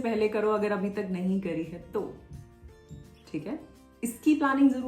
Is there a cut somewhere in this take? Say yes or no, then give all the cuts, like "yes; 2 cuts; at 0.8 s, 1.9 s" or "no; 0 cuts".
no; 0 cuts